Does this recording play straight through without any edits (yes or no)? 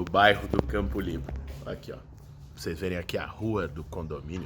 no